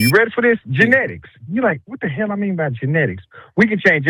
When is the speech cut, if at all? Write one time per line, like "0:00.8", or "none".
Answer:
none

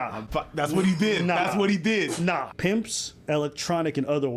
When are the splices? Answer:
0:02.4

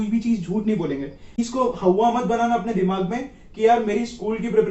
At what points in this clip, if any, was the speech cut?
0:01.3

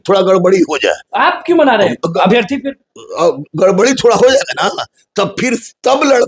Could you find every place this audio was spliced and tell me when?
0:01.0

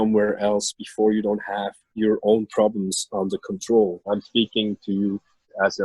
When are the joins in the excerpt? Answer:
0:04.0

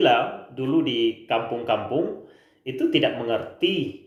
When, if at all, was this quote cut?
none

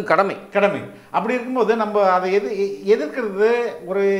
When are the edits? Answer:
none

